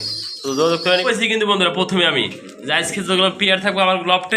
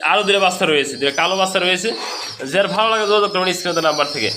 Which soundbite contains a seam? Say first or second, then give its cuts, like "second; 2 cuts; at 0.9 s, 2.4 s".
first; 1 cut; at 1.0 s